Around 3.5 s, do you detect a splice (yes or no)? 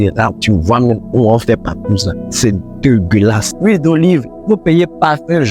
yes